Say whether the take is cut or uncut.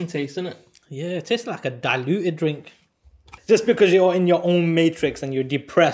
cut